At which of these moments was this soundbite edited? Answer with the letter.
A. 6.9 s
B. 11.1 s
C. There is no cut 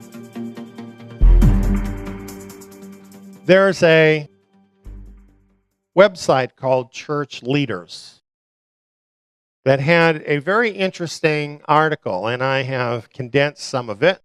B